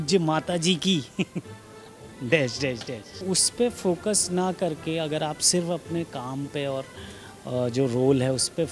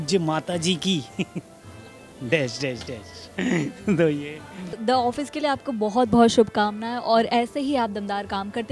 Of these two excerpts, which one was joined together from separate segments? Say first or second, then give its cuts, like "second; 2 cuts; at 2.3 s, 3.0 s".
first; 1 cut; at 3.2 s